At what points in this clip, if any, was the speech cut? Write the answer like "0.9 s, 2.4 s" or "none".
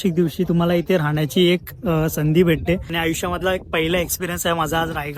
2.9 s